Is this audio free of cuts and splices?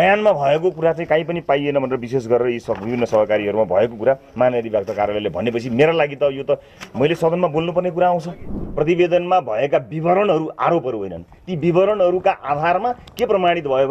no; 1 cut; at 8.6 s

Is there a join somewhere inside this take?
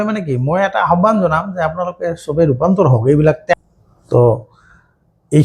yes; 1 cut; at 3.5 s

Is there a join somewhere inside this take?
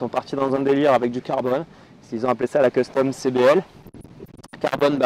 no; 0 cuts

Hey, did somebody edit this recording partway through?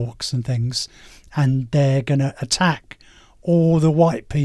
no; 0 cuts

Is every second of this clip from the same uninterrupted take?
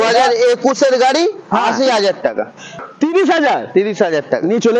no; 1 cut; at 2.7 s

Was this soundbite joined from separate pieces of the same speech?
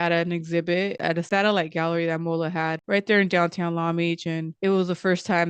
no; 0 cuts

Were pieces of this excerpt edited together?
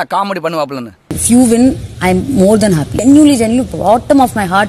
yes; 1 cut; at 1.0 s

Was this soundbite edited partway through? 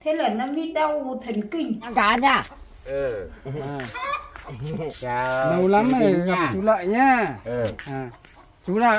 yes; 1 cut; at 1.9 s

